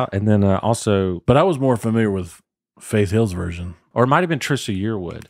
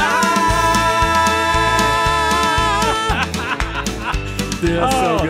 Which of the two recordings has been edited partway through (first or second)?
first